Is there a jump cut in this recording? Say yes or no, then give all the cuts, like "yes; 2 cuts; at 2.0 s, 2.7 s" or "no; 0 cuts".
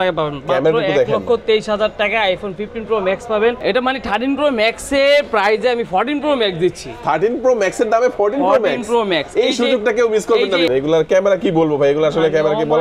yes; 2 cuts; at 3.6 s, 10.7 s